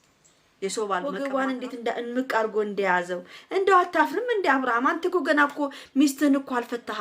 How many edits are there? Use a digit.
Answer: 1